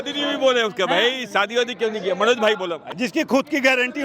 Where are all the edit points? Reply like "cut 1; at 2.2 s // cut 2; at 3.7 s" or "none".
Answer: cut 1; at 2.8 s